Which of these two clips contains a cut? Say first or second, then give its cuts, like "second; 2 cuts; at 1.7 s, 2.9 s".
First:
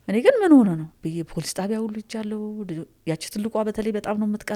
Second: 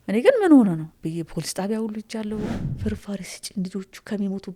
second; 1 cut; at 2.5 s